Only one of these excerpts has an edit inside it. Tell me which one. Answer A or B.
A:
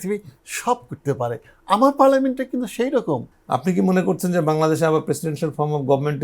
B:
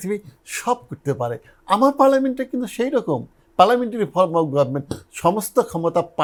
A